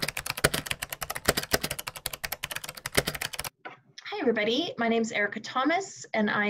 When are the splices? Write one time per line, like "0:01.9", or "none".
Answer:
0:03.4